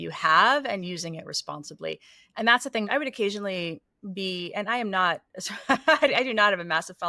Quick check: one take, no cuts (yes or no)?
no